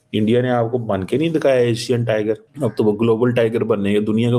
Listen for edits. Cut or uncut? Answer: cut